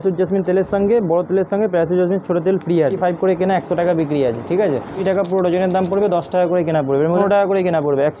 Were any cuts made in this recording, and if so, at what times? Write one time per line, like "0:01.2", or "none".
0:03.0
0:05.0
0:07.2